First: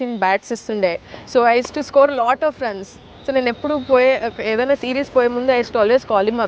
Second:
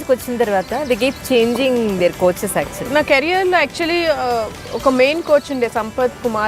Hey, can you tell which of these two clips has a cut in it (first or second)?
second